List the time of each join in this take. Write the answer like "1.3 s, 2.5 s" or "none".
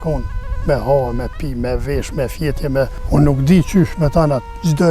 3.0 s